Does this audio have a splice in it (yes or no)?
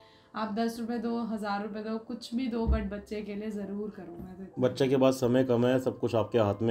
no